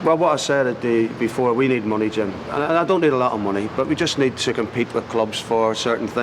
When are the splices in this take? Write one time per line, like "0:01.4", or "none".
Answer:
none